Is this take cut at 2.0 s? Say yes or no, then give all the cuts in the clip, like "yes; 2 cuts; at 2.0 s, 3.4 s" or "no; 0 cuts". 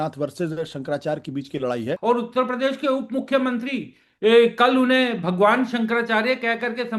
yes; 1 cut; at 2.0 s